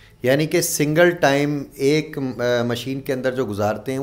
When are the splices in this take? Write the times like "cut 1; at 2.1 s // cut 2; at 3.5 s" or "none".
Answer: none